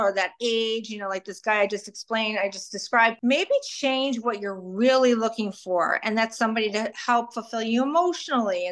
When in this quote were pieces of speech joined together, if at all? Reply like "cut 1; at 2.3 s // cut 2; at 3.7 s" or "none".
cut 1; at 3.2 s